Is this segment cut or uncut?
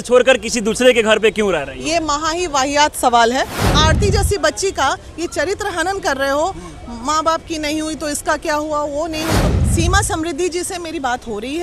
cut